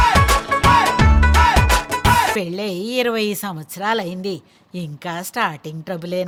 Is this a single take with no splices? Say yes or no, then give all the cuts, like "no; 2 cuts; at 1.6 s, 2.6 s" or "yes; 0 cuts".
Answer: yes; 0 cuts